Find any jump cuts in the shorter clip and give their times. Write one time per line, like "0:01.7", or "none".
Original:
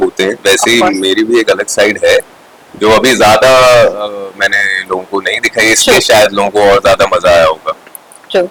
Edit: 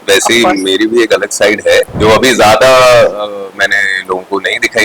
0:01.9